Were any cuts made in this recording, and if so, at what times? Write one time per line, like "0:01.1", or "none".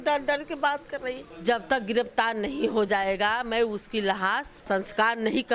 0:01.3
0:04.5